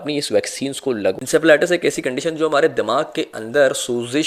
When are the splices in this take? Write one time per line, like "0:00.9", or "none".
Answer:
0:01.2